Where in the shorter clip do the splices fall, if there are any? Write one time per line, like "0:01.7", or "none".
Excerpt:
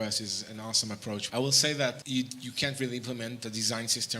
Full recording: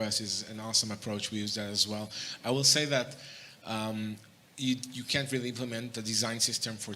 0:01.2
0:02.0